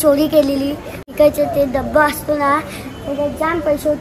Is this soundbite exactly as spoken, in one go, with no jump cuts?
no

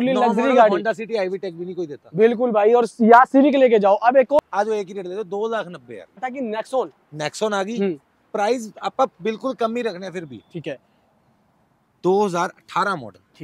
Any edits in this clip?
yes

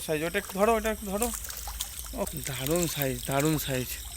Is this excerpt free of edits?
no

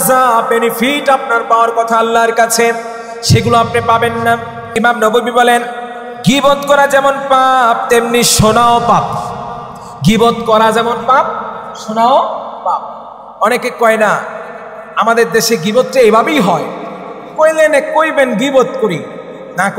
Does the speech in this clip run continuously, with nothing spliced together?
no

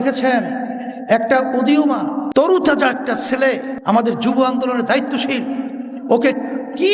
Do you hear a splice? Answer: yes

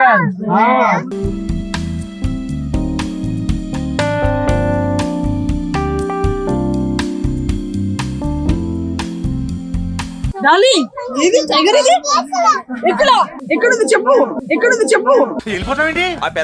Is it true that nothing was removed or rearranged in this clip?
yes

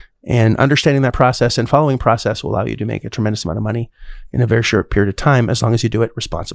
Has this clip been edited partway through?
no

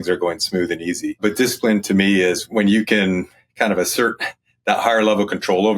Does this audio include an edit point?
yes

